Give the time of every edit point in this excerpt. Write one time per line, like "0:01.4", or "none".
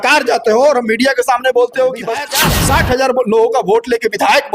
0:02.3